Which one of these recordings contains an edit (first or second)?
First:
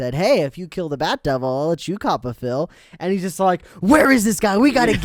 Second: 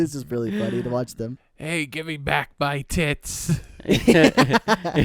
second